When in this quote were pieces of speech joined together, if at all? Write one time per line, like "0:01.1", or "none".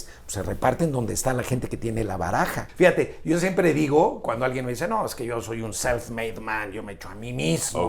0:02.7

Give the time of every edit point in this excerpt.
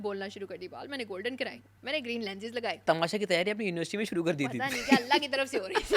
0:01.7
0:02.8

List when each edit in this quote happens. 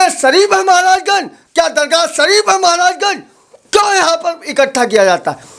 none

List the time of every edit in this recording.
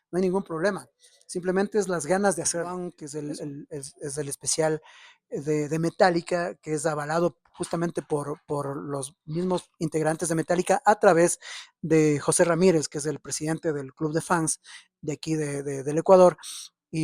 0:02.8

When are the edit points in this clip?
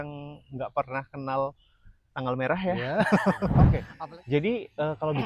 0:03.8

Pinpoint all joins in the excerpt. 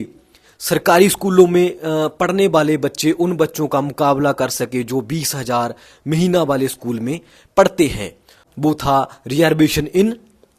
0:08.4

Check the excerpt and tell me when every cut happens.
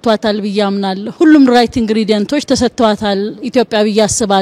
0:01.1

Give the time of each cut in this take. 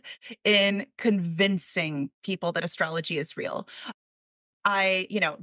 none

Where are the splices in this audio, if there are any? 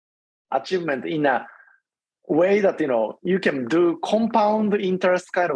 none

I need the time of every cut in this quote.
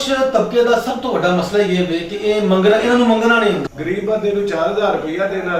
0:03.7

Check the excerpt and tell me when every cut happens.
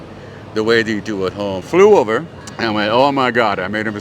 0:01.6

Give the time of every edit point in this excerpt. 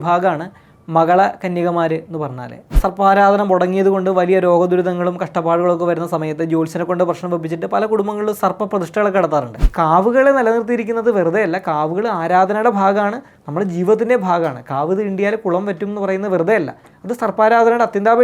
0:02.8
0:09.7

